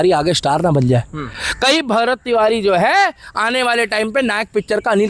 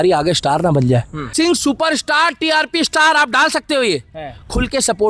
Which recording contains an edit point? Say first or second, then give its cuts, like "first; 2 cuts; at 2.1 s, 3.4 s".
second; 1 cut; at 1.3 s